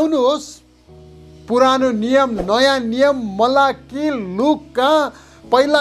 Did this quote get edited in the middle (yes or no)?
no